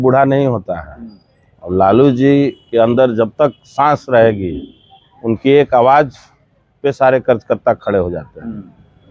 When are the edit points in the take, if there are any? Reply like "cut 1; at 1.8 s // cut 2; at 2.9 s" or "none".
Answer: none